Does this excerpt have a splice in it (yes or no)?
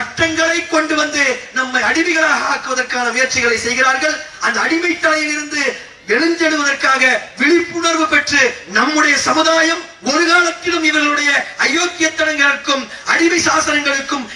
no